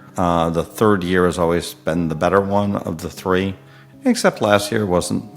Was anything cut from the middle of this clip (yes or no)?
no